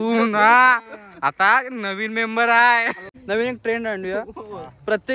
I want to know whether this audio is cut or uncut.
cut